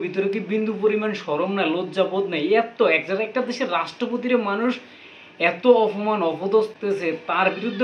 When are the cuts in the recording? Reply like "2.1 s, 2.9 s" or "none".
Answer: 6.7 s

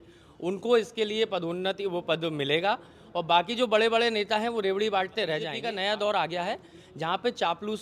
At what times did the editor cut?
5.6 s

